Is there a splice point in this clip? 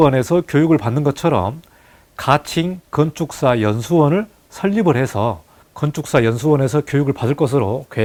no; 0 cuts

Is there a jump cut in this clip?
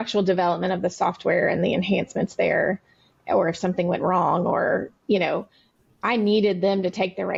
no; 0 cuts

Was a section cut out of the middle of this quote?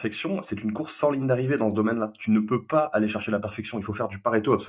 no; 0 cuts

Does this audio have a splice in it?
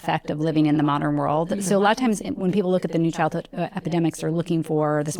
no; 0 cuts

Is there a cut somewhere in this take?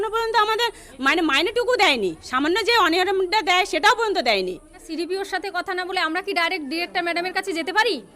yes; 1 cut; at 4.9 s

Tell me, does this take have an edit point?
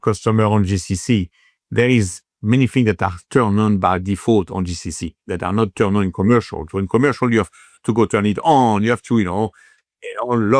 no; 0 cuts

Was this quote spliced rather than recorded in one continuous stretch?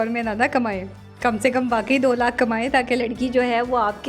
no; 0 cuts

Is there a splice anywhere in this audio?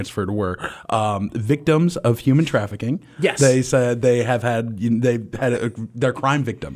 no; 0 cuts

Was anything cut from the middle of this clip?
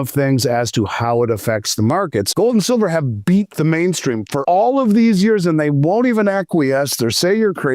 yes; 2 cuts; at 2.3 s, 4.4 s

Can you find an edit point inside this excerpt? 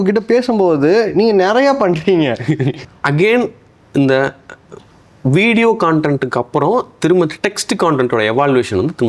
yes; 1 cut; at 2.8 s

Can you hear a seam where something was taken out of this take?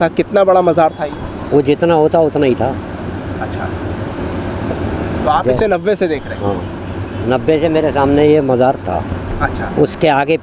no; 0 cuts

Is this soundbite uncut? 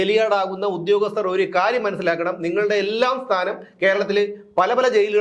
yes; 0 cuts

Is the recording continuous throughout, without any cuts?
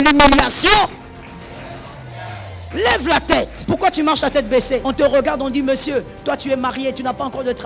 no; 3 cuts; at 2.6 s, 3.6 s, 4.8 s

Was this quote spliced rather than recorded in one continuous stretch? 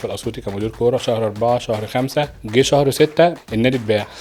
yes; 2 cuts; at 2.4 s, 3.4 s

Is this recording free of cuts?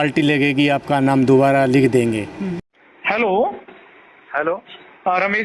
no; 1 cut; at 2.6 s

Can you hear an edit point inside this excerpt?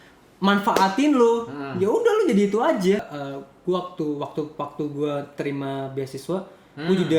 yes; 1 cut; at 3.0 s

